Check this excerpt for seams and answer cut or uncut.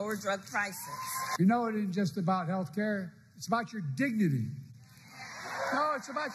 cut